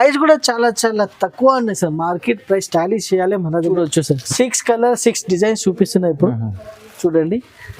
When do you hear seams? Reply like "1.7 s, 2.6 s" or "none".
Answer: 3.7 s